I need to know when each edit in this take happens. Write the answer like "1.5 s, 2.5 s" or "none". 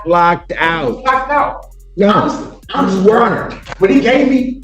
none